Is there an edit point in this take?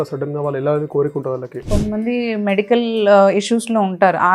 yes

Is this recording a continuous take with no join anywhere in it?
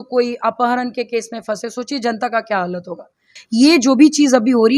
no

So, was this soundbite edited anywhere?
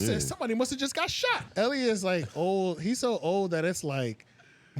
yes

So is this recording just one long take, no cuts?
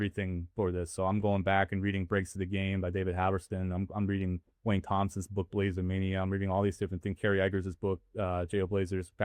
yes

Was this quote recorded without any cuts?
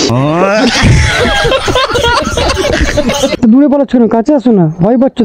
yes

